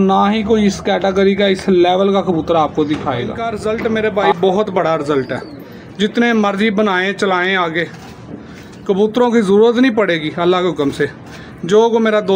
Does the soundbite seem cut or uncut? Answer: cut